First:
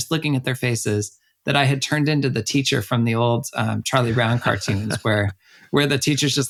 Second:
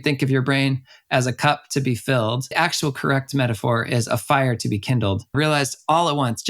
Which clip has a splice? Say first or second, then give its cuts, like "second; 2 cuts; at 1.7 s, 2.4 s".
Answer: second; 2 cuts; at 2.5 s, 5.3 s